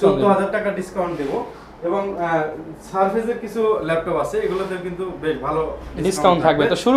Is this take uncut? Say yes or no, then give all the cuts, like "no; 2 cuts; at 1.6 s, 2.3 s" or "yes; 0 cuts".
yes; 0 cuts